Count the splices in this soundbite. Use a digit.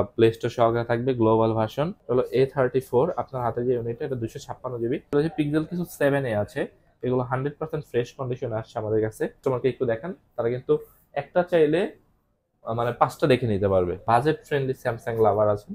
4